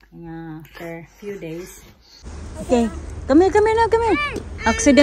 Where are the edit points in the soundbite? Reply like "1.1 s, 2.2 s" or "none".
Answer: 2.3 s